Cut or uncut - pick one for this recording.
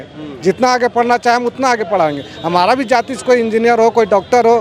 uncut